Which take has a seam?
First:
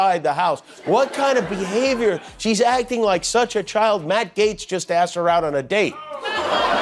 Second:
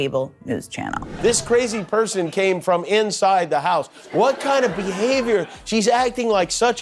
second; 1 cut; at 1.1 s

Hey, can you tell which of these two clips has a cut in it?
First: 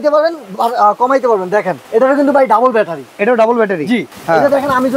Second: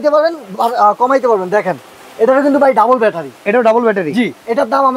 first; 2 cuts; at 1.8 s, 4.1 s

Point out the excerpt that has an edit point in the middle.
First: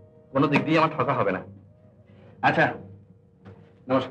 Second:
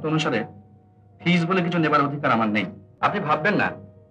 second; 1 cut; at 2.8 s

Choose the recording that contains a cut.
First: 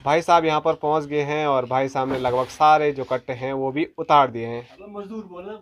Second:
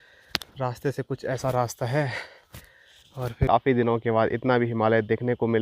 second; 1 cut; at 3.5 s

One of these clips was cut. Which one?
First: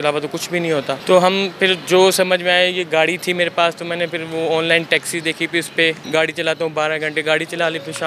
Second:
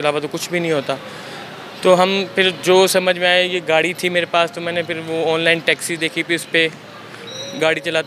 first; 2 cuts; at 1.0 s, 6.0 s

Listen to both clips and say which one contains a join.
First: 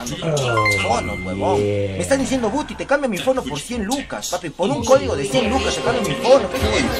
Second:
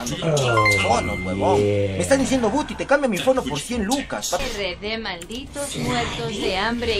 second; 1 cut; at 4.5 s

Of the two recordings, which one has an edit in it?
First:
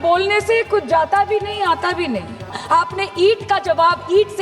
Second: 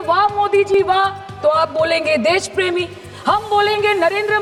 first; 1 cut; at 2.6 s

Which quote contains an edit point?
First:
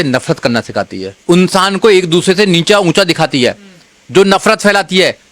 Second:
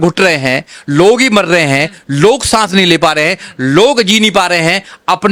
first; 1 cut; at 1.1 s

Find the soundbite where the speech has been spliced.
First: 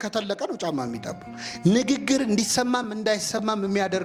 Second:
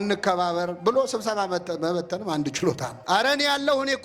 second; 1 cut; at 3.0 s

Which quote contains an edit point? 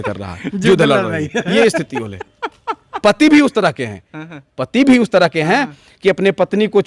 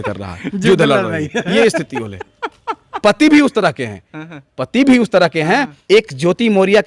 second; 1 cut; at 5.7 s

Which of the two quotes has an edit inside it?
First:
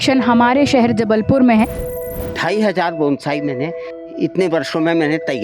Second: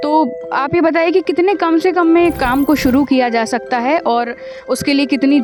first; 1 cut; at 2.0 s

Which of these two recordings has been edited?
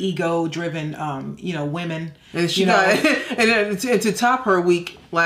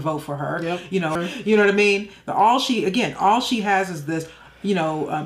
second; 1 cut; at 1.2 s

